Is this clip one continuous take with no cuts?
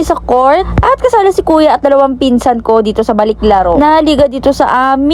yes; 0 cuts

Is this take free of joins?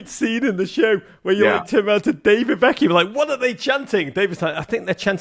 yes; 0 cuts

